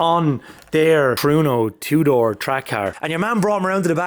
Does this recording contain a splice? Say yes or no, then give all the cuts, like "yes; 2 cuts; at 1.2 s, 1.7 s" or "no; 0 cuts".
yes; 1 cut; at 3.0 s